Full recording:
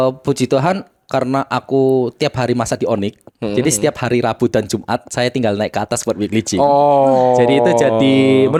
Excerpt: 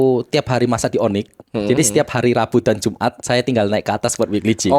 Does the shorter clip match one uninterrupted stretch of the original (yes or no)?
yes